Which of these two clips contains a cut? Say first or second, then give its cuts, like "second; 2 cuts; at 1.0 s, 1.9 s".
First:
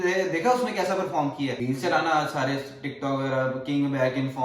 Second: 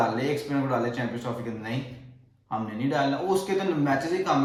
first; 1 cut; at 1.6 s